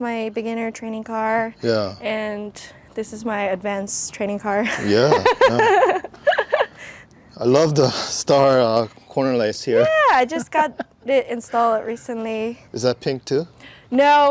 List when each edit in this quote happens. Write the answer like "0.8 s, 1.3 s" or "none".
none